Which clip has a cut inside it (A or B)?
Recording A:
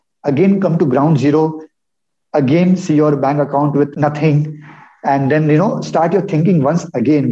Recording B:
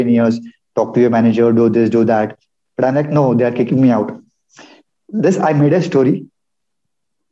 A